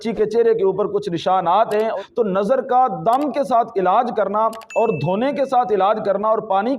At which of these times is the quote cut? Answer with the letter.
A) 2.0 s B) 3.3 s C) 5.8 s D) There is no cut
A